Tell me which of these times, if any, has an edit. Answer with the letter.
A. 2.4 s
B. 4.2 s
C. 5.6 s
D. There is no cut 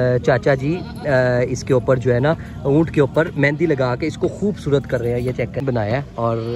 C